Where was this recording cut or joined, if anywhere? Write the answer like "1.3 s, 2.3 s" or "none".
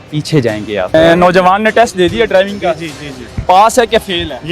0.9 s

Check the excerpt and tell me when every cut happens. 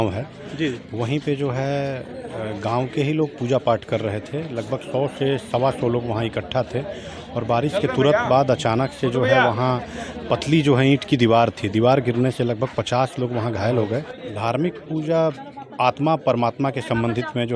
14.2 s

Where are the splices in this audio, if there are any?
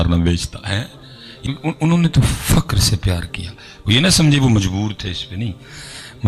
1.4 s

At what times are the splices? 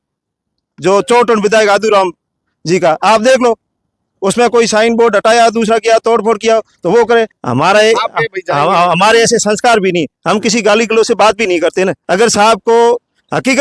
7.4 s, 12.0 s

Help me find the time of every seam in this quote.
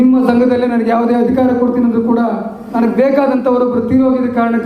2.7 s

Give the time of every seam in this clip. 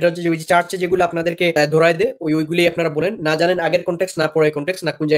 none

